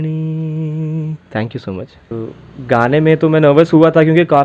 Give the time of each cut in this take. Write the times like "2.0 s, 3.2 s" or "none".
2.1 s